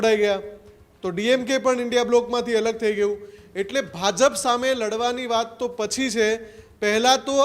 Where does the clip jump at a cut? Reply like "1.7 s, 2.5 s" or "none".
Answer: none